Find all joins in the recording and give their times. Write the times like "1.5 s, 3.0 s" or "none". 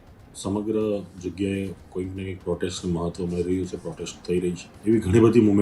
4.7 s